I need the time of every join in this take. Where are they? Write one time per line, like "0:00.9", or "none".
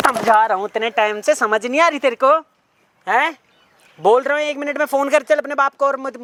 none